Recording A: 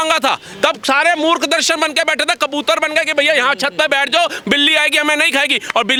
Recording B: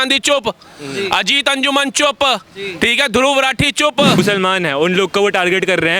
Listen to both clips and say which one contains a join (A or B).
B